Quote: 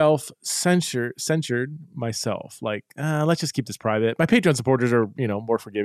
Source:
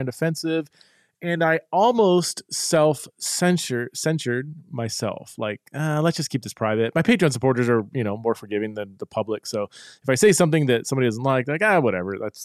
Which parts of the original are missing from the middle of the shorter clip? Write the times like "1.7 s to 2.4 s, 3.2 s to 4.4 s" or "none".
none